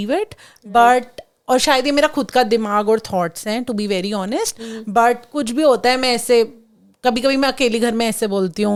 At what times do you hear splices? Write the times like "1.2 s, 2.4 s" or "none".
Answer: none